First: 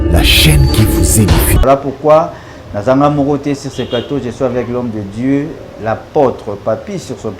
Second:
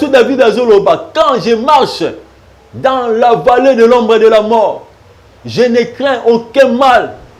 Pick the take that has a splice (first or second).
first